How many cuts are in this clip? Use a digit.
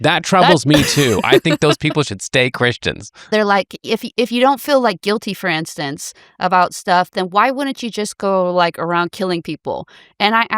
1